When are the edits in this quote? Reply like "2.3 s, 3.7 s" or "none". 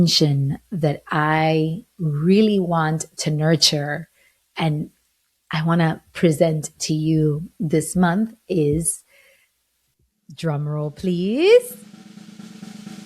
11.8 s